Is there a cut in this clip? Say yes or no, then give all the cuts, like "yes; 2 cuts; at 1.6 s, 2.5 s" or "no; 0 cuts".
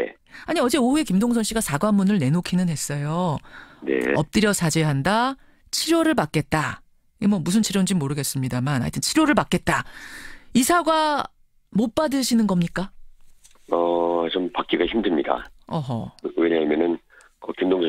yes; 1 cut; at 13.6 s